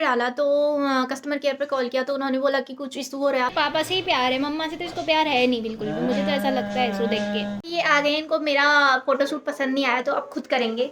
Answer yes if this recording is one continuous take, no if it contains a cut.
no